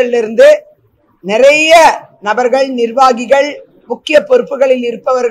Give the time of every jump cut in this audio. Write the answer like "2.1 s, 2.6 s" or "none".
none